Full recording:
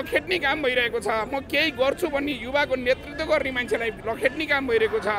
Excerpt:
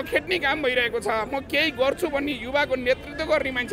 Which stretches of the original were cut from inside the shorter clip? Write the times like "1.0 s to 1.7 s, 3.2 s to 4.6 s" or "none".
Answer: none